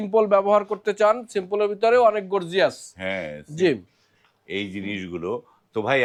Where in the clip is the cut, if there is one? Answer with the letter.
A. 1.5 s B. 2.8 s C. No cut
C